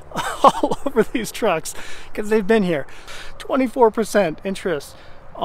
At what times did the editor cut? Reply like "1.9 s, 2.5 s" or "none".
3.1 s